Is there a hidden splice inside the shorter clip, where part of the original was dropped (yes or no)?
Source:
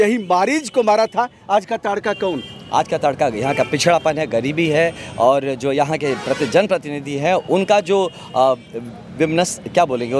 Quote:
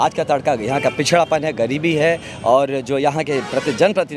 no